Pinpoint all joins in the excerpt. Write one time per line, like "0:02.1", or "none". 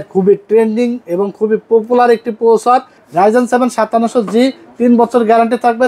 0:03.0